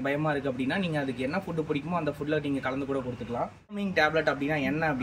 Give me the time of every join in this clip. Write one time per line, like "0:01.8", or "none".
0:03.9